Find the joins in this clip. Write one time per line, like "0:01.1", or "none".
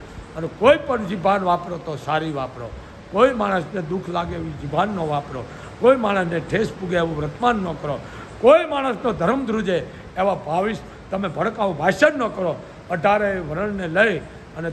none